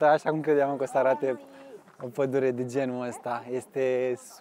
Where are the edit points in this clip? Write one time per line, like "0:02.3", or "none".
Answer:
none